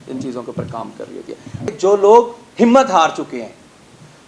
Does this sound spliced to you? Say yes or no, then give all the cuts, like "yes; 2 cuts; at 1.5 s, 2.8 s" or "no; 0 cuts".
yes; 1 cut; at 1.6 s